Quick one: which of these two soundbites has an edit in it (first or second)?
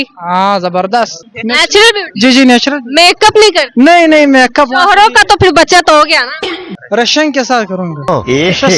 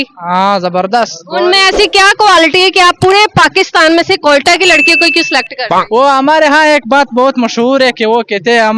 second